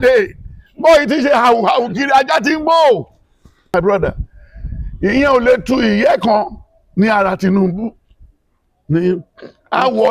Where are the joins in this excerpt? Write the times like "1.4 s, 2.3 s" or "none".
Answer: 3.7 s